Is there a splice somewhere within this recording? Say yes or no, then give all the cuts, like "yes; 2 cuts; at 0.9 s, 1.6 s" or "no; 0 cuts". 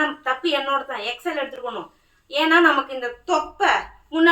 no; 0 cuts